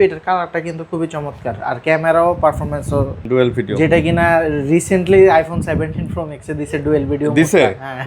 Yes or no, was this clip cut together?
yes